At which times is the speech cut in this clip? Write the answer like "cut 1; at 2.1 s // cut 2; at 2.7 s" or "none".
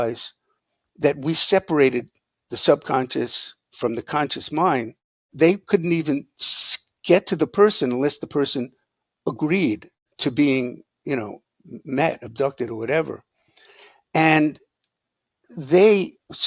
cut 1; at 5.3 s